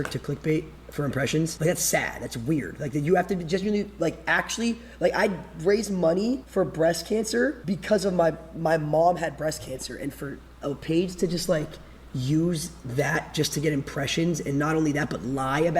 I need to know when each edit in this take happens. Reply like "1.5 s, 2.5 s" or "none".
1.5 s, 6.5 s, 7.6 s